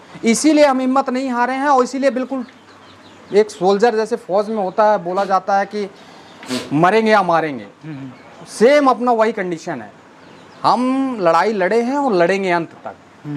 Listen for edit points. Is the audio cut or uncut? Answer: uncut